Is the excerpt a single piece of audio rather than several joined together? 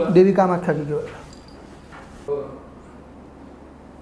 no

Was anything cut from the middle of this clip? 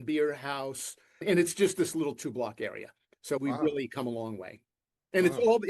yes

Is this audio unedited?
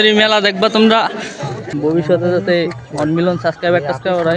no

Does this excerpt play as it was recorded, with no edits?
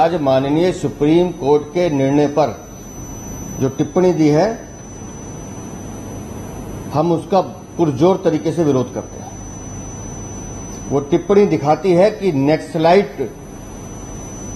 yes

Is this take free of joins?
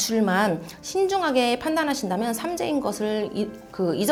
yes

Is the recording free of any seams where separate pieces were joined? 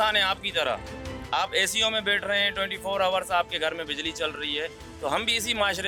yes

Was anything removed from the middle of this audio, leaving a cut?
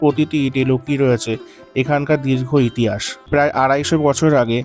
yes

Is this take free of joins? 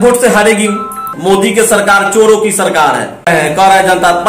no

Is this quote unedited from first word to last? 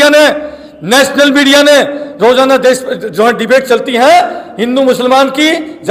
yes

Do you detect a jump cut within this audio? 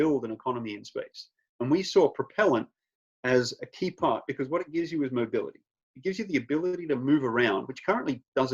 no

